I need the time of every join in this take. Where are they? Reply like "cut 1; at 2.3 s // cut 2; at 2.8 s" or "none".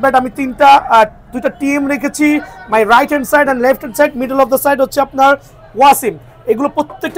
none

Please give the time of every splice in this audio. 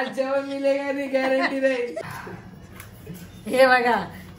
cut 1; at 2.0 s

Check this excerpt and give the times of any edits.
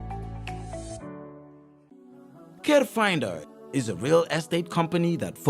cut 1; at 1.9 s

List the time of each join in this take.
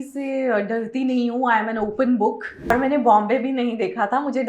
cut 1; at 2.7 s

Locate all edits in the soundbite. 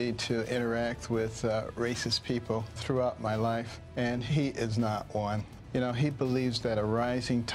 cut 1; at 2.8 s // cut 2; at 3.8 s // cut 3; at 5.5 s

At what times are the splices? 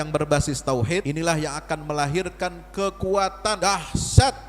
cut 1; at 1.0 s // cut 2; at 3.6 s

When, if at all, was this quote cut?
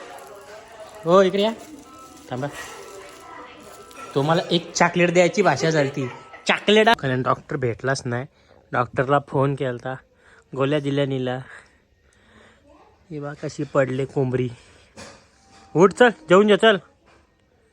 cut 1; at 6.9 s

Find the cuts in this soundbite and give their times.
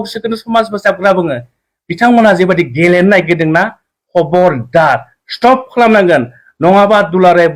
none

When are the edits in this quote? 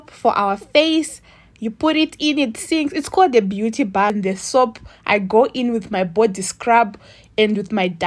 cut 1; at 4.1 s

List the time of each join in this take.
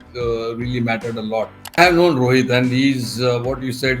cut 1; at 1.8 s

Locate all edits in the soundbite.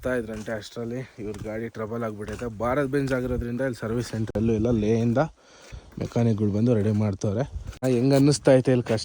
cut 1; at 7.8 s

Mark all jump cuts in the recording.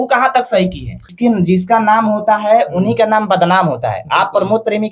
cut 1; at 1.1 s

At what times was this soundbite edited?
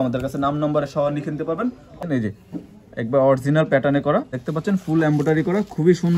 cut 1; at 2.0 s // cut 2; at 4.4 s

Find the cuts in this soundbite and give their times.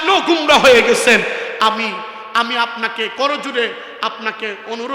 none

